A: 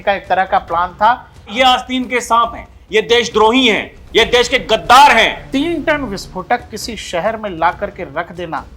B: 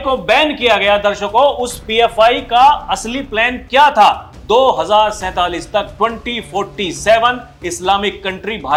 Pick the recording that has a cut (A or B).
A